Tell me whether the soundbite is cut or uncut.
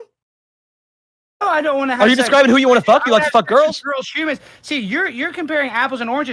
uncut